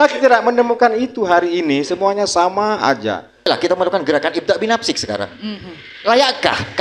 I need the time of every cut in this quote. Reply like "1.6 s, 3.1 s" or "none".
3.5 s